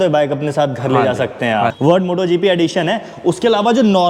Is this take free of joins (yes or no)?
no